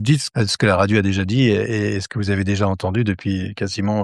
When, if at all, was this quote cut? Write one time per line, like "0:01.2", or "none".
none